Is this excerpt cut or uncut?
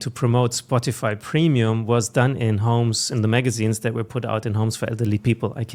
uncut